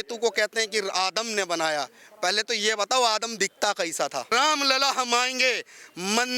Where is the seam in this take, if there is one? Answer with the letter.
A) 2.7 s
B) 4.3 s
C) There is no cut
B